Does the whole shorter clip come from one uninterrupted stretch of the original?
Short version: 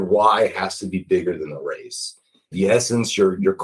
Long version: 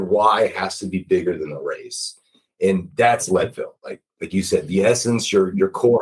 no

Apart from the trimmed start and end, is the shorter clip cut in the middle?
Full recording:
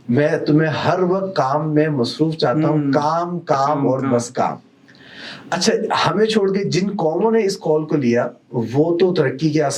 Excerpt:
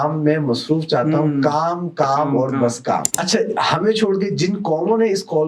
yes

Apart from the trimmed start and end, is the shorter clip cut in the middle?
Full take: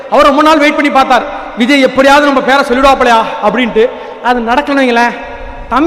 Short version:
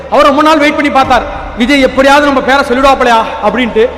no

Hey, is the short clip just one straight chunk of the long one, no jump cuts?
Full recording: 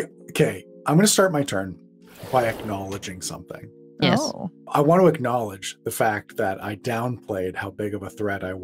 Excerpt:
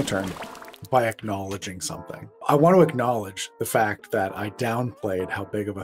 no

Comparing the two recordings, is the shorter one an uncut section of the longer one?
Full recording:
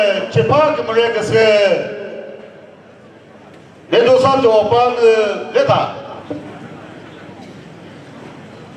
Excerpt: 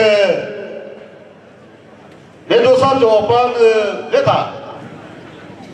no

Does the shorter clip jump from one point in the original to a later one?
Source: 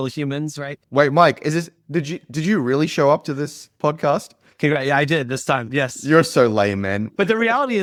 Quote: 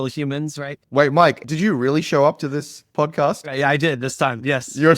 yes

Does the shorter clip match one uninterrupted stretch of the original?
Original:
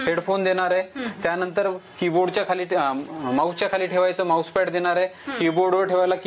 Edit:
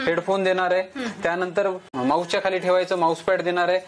no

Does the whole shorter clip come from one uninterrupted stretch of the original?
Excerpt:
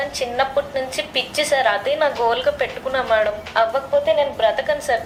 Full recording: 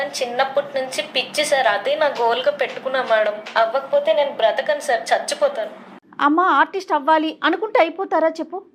yes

